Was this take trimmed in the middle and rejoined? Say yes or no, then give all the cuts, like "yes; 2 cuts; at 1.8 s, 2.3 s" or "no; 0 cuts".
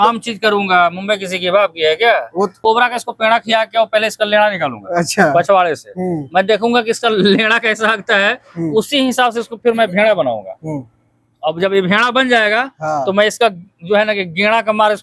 yes; 1 cut; at 2.5 s